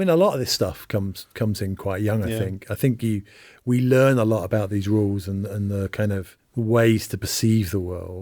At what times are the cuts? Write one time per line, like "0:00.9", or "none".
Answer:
0:06.4